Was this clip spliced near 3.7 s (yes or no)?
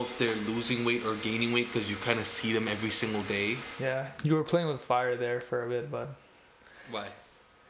yes